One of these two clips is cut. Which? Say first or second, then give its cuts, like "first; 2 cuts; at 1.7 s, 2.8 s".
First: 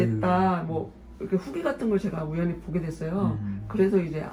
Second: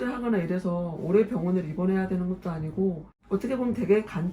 second; 1 cut; at 3.1 s